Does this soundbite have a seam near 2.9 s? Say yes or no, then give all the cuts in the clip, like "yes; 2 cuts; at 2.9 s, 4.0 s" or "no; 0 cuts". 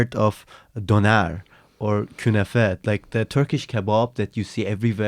no; 0 cuts